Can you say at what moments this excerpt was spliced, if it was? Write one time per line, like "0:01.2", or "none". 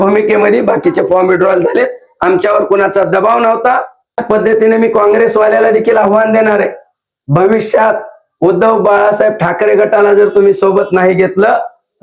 0:04.2